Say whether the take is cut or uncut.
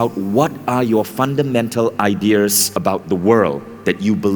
cut